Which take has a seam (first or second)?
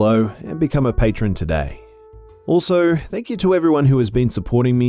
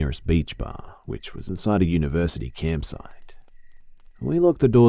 first